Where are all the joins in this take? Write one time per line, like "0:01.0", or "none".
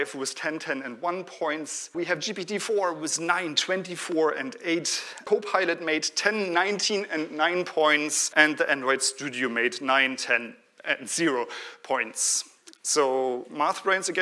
0:01.9
0:05.2
0:08.2